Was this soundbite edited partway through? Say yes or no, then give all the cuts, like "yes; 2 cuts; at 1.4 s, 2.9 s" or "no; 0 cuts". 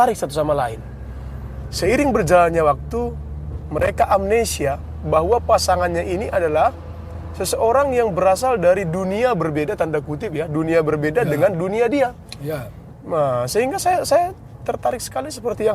no; 0 cuts